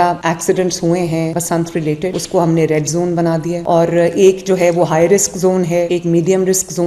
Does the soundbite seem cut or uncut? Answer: uncut